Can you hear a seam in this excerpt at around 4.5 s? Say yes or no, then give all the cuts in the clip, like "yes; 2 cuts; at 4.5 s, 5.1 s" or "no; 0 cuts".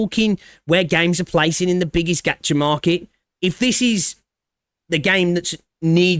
no; 1 cut; at 3.2 s